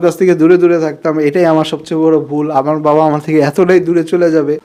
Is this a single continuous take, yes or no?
yes